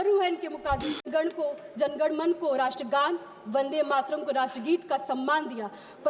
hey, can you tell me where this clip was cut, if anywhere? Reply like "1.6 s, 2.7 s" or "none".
1.0 s

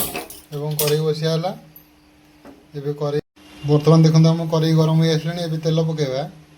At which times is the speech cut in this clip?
3.2 s

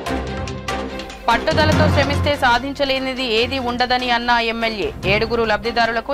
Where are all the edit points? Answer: none

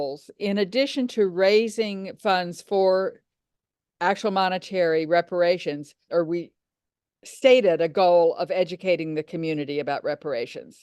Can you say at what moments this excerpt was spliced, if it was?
6.0 s

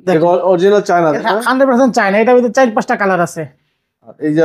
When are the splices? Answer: none

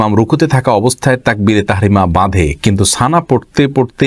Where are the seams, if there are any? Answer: none

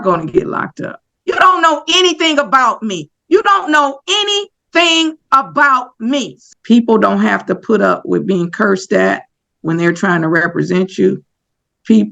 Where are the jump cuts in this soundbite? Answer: 1.1 s, 6.4 s

